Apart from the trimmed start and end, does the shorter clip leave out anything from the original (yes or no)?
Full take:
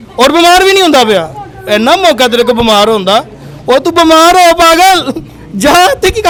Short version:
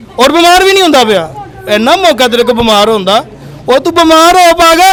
no